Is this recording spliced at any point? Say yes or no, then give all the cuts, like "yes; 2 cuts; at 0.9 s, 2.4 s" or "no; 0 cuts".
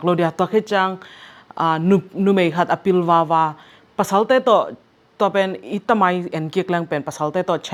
no; 0 cuts